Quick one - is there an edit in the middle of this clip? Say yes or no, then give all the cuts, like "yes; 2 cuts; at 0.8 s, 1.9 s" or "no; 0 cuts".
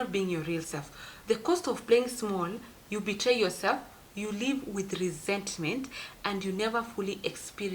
yes; 1 cut; at 1.1 s